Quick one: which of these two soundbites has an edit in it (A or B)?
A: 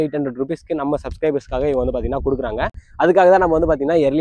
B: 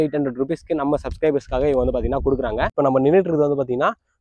B